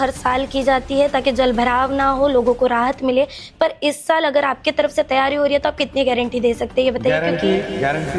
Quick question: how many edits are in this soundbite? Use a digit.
0